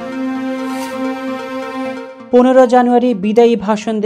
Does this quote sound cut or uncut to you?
cut